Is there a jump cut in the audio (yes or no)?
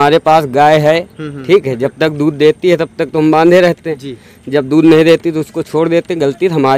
no